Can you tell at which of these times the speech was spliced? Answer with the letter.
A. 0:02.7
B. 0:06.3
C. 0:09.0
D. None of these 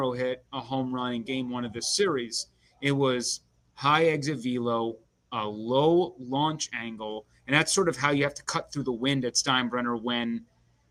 D